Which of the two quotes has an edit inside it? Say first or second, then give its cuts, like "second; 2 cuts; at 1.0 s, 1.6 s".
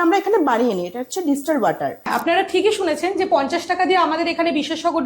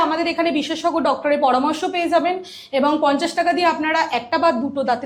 first; 1 cut; at 2.0 s